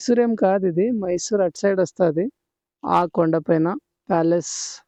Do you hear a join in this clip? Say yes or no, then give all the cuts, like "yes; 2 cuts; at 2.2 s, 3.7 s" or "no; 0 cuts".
no; 0 cuts